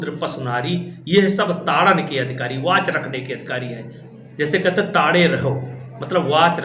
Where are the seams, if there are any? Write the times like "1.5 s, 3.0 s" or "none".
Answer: 4.0 s

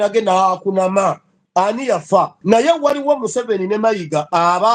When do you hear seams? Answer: 1.3 s, 2.4 s

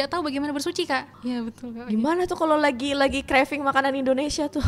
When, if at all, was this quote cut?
1.1 s

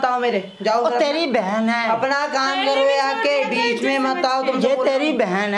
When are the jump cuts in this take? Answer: none

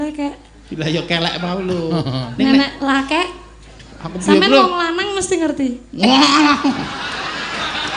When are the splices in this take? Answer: none

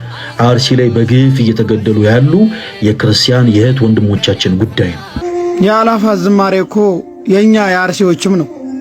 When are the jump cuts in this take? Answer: 5.2 s

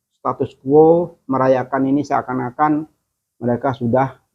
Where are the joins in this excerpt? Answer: none

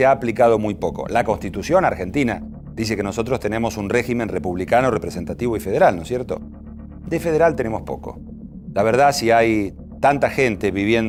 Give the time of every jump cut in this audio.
none

